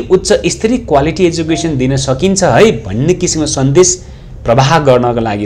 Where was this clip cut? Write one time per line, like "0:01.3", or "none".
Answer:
none